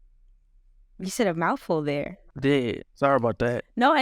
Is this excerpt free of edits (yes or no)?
no